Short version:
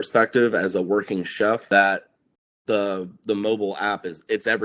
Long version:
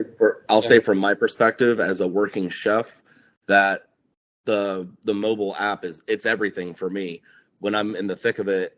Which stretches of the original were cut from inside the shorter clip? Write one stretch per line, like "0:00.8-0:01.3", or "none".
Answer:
0:02.9-0:03.4